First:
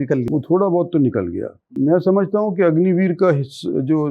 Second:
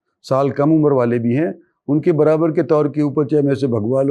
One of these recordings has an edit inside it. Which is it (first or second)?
first